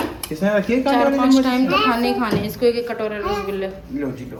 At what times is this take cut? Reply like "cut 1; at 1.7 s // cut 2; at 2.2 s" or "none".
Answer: none